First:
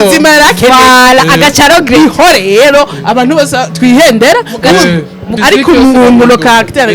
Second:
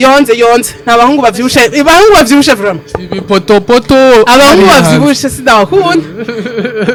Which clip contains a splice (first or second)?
first